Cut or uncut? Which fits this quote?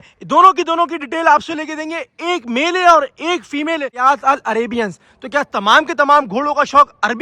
cut